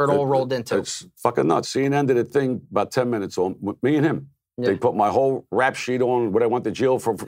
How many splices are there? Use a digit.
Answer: 1